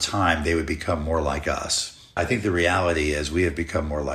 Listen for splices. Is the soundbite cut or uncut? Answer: cut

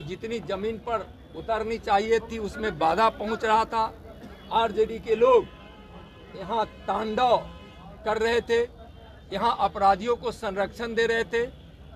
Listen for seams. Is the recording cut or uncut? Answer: uncut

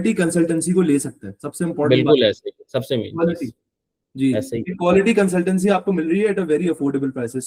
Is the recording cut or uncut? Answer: uncut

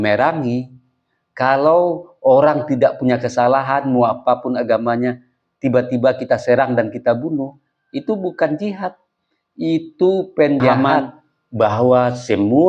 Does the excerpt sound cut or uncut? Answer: cut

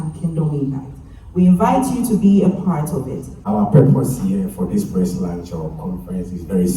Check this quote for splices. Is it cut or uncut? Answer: cut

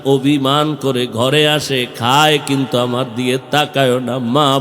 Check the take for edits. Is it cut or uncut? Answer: uncut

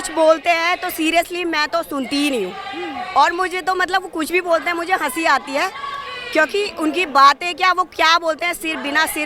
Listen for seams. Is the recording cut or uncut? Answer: uncut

